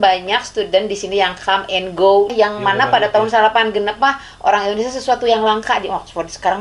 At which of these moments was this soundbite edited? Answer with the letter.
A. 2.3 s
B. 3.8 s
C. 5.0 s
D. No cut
A